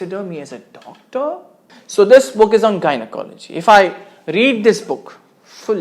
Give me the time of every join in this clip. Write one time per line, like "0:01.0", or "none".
0:01.7